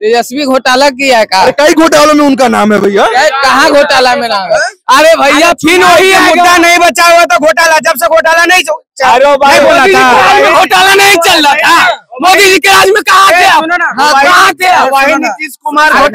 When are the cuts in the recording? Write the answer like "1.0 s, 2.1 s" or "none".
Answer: none